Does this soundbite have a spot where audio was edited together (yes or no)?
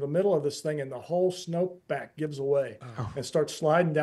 no